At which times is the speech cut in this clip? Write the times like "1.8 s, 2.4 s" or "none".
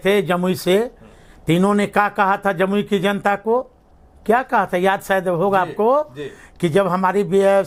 none

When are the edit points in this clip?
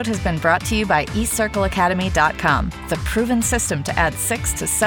none

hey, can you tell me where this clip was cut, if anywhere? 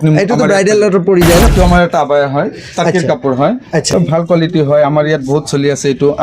1.5 s, 3.9 s

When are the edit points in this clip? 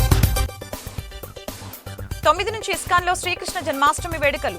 2.1 s

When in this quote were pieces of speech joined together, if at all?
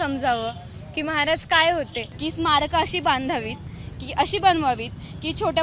2.0 s

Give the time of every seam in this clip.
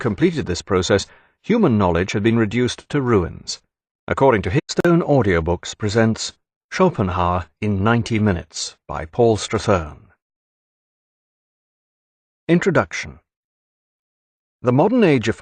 none

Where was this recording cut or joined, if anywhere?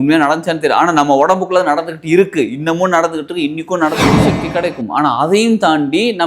4.3 s

